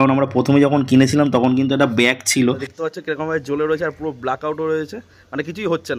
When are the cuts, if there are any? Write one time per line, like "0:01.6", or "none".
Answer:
0:02.7